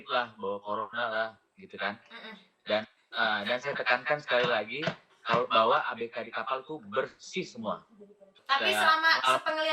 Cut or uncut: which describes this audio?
uncut